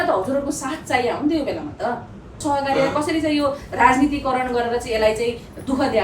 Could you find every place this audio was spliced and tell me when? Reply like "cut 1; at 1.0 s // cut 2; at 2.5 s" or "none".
cut 1; at 2.4 s